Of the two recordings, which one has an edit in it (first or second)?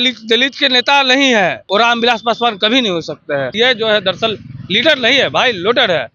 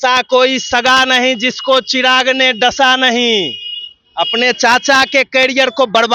first